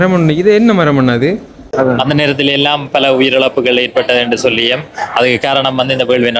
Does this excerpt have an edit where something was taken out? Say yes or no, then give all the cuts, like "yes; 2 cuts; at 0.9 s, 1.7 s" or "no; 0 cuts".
yes; 1 cut; at 1.6 s